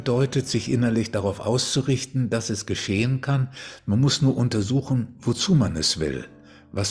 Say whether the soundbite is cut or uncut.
uncut